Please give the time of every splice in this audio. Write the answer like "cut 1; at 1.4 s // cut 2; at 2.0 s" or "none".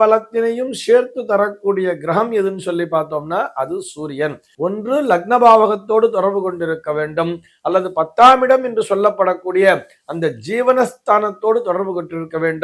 cut 1; at 4.4 s